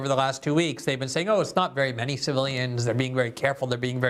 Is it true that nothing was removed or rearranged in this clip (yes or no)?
yes